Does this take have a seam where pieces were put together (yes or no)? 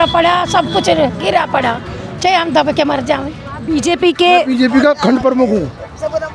yes